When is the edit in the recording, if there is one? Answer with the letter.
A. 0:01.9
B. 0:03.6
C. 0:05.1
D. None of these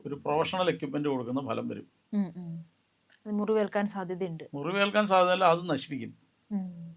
D